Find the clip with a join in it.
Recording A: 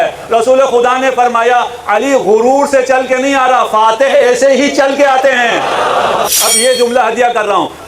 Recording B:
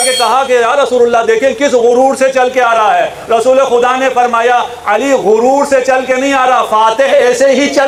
A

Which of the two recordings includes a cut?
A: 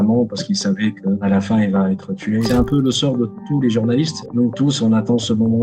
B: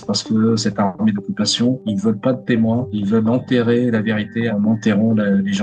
A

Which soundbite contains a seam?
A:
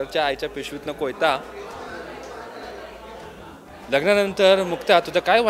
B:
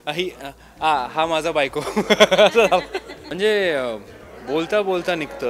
B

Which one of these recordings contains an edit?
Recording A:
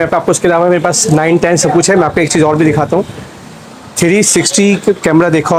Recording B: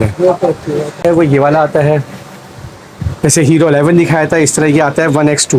B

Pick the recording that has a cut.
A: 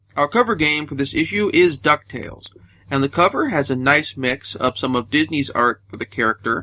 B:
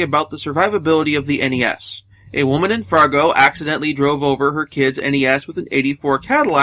B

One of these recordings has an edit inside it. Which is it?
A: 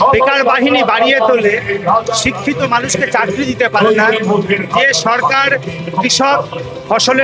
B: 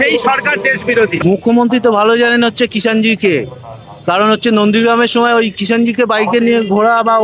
B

